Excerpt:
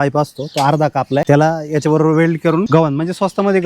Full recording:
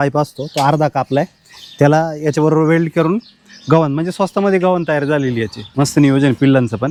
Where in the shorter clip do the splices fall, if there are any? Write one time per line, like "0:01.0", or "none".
0:01.2
0:02.7